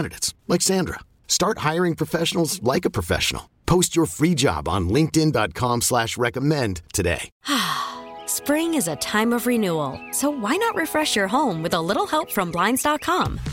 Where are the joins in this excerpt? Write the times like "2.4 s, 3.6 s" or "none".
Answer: 7.3 s